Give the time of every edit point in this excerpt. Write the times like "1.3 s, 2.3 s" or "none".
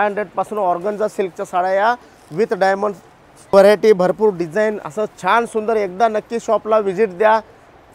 3.5 s